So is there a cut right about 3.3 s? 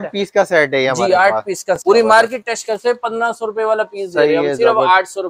no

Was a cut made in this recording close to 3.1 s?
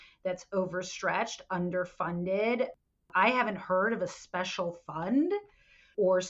yes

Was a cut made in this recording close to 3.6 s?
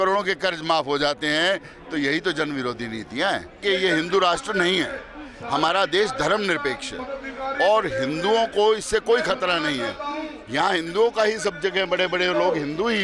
yes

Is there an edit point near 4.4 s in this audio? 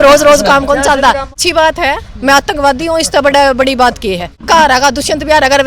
yes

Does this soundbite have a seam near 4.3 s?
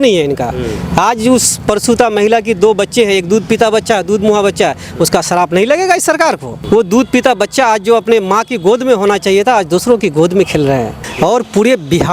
no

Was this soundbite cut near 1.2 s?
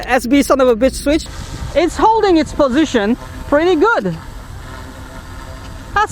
yes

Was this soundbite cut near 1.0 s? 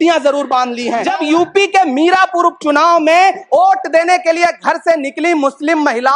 yes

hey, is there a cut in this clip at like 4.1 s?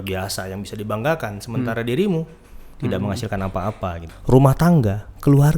yes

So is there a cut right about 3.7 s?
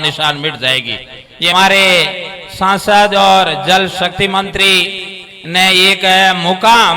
no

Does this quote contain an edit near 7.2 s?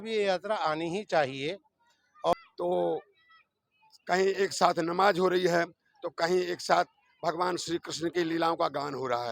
no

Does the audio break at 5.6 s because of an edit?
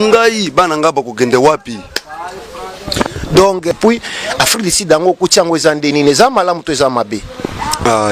no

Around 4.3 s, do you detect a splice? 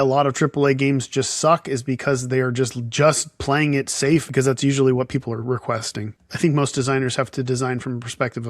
yes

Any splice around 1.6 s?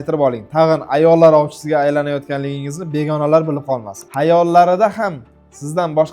no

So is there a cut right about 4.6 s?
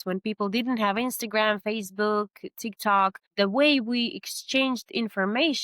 no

